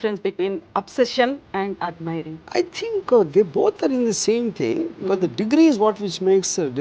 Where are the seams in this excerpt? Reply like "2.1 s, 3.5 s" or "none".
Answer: 2.5 s